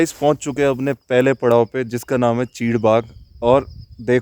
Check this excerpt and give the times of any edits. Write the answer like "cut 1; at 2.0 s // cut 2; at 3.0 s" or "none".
none